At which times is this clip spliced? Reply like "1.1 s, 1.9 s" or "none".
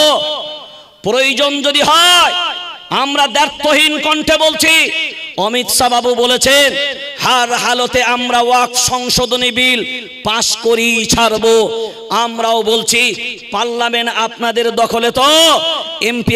none